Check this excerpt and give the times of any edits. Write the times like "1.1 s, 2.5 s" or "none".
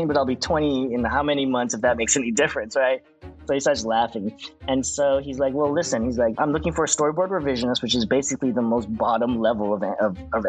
6.3 s